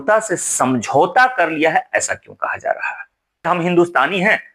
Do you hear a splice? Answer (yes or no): yes